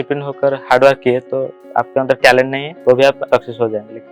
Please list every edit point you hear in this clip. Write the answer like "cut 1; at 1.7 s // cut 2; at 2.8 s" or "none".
cut 1; at 1.5 s // cut 2; at 2.6 s // cut 3; at 3.2 s